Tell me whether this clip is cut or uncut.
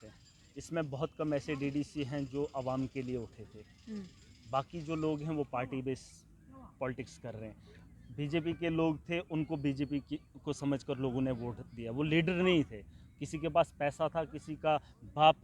uncut